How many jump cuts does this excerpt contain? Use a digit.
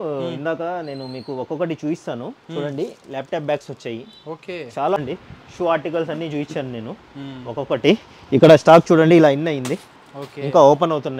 1